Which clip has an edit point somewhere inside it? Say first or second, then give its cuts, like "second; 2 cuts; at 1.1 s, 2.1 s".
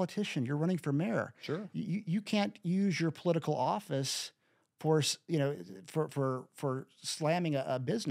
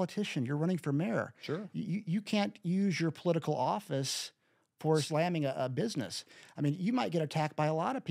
second; 1 cut; at 5.1 s